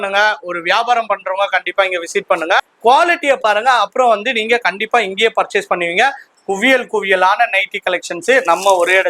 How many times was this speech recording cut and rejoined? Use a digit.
2